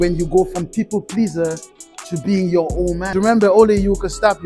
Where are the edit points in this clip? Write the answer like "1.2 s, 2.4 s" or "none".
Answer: 3.1 s